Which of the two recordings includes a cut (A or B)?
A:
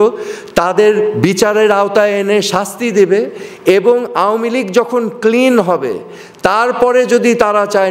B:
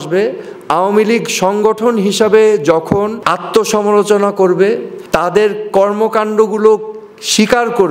B